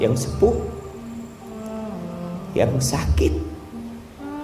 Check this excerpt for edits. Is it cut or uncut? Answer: uncut